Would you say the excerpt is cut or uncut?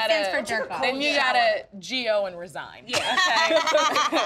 uncut